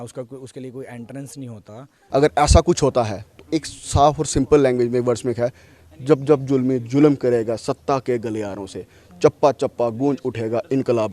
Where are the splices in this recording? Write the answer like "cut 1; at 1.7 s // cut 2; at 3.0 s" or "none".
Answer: cut 1; at 1.9 s